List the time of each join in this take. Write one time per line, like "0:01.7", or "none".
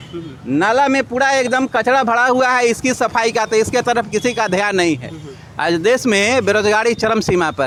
none